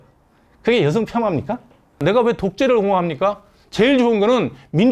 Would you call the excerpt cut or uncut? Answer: cut